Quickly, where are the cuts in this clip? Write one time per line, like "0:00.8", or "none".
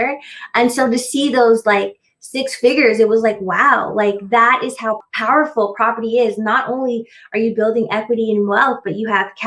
0:05.1

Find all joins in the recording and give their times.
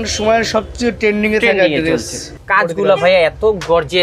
none

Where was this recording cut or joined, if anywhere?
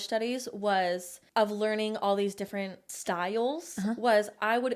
0:01.1
0:02.8

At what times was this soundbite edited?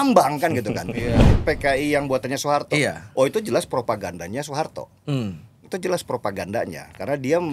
0:01.3

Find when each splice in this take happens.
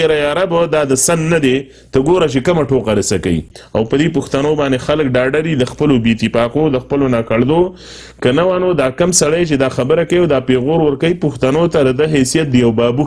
0:03.6

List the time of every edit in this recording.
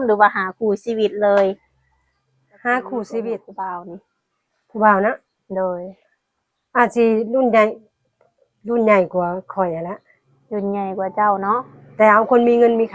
0:03.5

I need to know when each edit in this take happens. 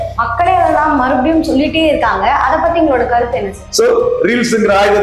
0:03.6

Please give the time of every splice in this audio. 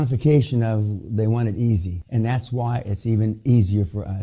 0:02.0

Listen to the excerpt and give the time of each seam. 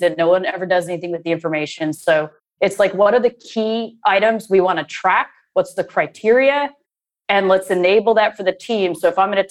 none

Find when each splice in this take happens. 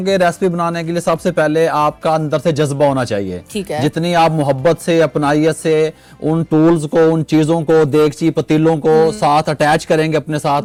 none

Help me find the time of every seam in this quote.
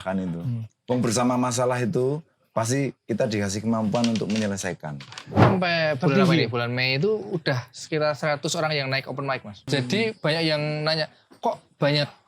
0:05.4
0:09.6

